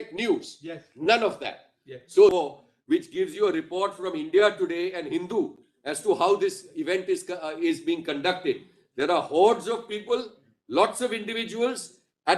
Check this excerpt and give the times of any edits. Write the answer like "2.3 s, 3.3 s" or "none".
2.3 s